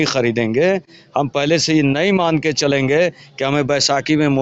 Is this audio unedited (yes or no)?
yes